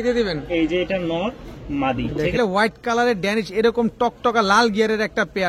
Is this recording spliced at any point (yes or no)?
yes